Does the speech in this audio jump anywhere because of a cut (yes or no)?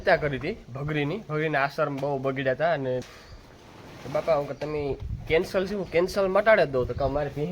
yes